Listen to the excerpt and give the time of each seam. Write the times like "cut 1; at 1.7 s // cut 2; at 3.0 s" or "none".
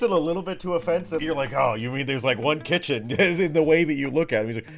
cut 1; at 1.2 s